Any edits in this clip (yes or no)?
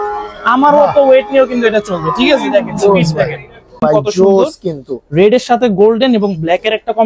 yes